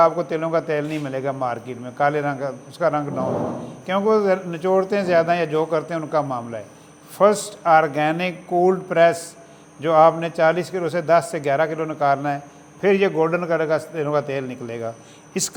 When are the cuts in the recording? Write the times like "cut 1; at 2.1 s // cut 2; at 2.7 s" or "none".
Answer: none